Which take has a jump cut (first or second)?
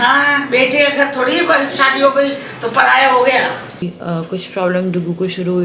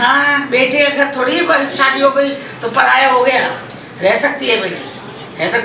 first